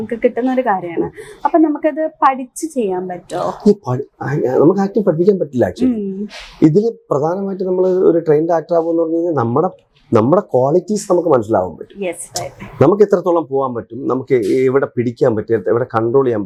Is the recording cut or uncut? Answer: uncut